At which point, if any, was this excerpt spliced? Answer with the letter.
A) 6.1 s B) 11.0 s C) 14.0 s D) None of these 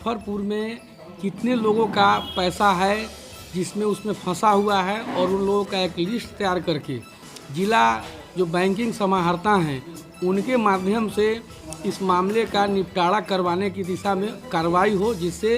D